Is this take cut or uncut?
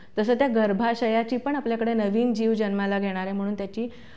uncut